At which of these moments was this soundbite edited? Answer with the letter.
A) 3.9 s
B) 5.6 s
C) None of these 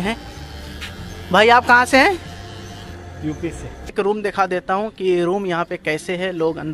A